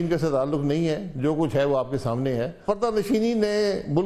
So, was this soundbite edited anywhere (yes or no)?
yes